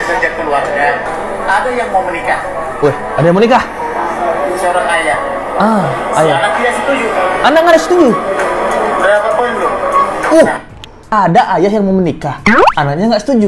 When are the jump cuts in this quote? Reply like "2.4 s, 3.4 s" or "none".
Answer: 1.1 s, 11.0 s